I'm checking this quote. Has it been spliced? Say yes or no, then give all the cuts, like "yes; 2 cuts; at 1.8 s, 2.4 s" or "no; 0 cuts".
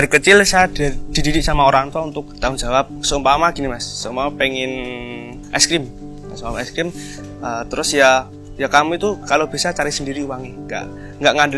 yes; 2 cuts; at 2.7 s, 5.3 s